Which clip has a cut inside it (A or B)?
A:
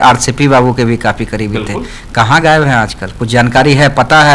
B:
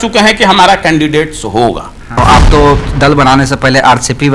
B